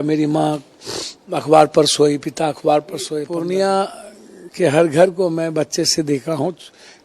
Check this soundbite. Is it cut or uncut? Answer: cut